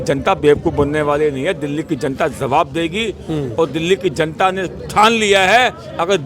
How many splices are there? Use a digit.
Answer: 0